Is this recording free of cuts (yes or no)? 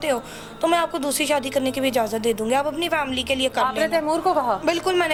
yes